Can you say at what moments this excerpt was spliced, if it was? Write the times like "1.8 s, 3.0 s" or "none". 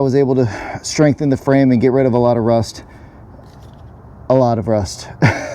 none